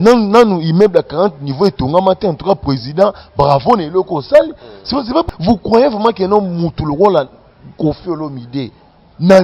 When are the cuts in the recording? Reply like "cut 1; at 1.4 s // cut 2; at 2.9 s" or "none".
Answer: cut 1; at 5.3 s